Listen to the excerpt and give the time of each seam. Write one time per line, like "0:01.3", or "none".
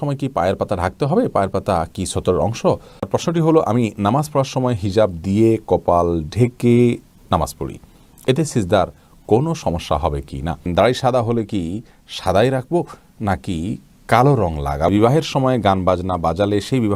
0:03.0
0:10.6
0:14.9